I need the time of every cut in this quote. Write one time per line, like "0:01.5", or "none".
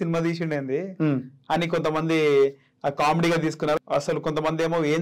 0:03.8